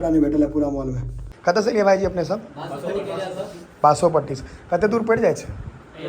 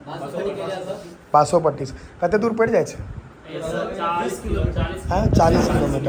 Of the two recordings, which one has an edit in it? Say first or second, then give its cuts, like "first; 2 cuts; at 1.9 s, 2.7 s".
first; 1 cut; at 1.1 s